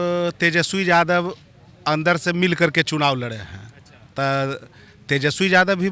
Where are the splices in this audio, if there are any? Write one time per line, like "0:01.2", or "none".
none